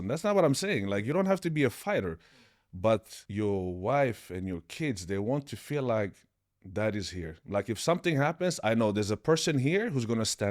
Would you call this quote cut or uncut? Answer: cut